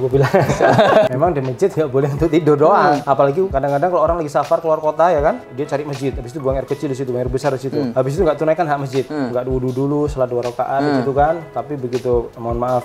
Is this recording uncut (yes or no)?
no